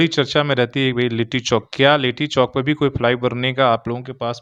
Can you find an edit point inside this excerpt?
no; 0 cuts

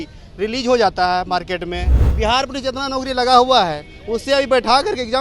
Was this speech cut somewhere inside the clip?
yes; 1 cut; at 2.0 s

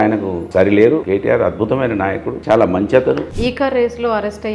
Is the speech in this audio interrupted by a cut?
yes; 2 cuts; at 1.0 s, 3.3 s

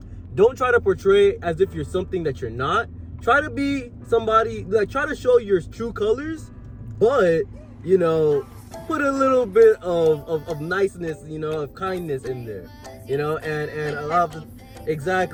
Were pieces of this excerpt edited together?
no; 0 cuts

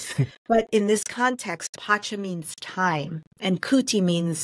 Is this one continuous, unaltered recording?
yes; 0 cuts

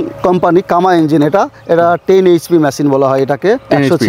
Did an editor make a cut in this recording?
no; 0 cuts

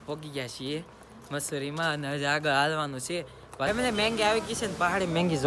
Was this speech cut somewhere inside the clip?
yes; 1 cut; at 3.7 s

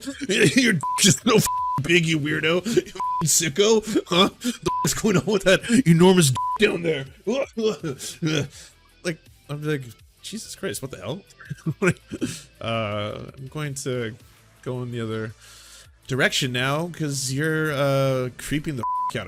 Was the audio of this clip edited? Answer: no; 0 cuts

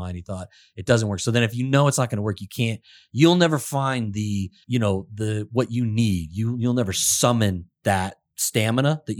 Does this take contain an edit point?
yes; 1 cut; at 4.6 s

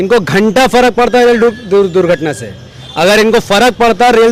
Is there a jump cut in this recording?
no; 0 cuts

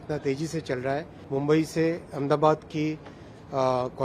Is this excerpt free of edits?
no; 1 cut; at 1.2 s

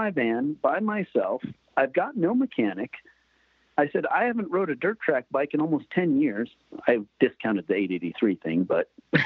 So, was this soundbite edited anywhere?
no; 0 cuts

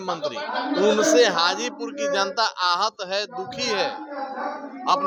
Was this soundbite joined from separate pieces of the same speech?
no; 0 cuts

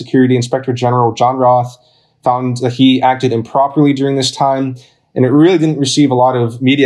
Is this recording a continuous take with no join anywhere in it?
yes; 0 cuts

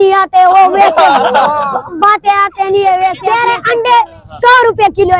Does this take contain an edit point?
yes; 1 cut; at 3.2 s

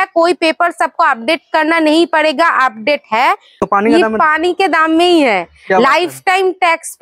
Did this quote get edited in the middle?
yes; 1 cut; at 3.5 s

